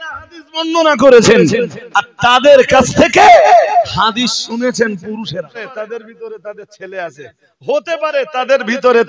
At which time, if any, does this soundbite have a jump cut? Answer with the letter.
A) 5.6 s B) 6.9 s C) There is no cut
A